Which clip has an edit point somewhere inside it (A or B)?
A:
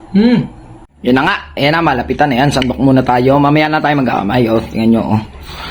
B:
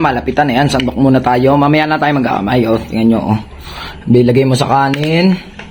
A